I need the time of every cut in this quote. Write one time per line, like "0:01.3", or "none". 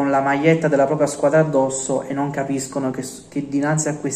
none